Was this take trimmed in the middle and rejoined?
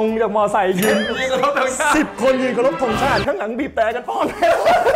no; 0 cuts

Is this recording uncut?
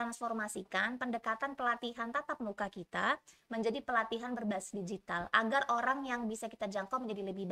yes; 0 cuts

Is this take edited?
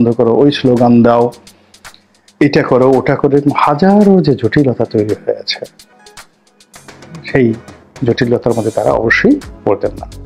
no; 0 cuts

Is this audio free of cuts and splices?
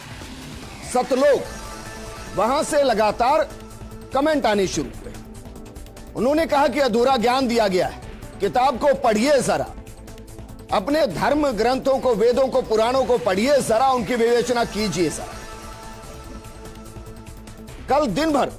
no; 1 cut; at 0.9 s

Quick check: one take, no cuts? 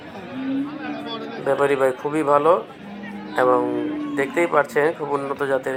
yes; 0 cuts

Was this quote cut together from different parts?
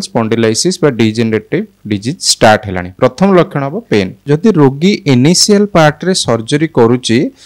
yes; 1 cut; at 4.2 s

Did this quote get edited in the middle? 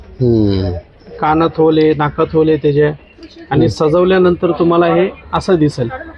no; 0 cuts

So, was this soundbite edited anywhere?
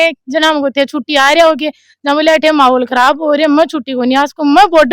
no; 0 cuts

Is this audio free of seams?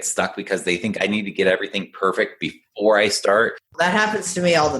no; 1 cut; at 3.6 s

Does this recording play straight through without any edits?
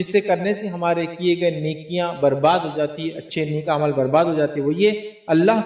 yes; 0 cuts

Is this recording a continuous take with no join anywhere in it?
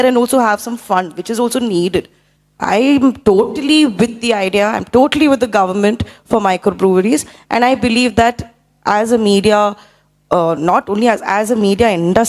yes; 0 cuts

